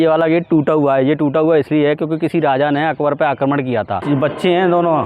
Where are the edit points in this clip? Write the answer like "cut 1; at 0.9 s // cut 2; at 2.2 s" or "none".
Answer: cut 1; at 4.0 s